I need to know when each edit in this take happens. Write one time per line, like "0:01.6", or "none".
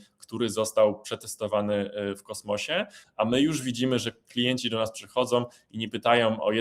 0:03.0